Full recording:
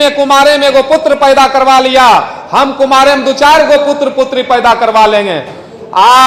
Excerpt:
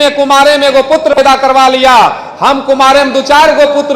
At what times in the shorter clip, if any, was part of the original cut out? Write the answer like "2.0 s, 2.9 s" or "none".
1.2 s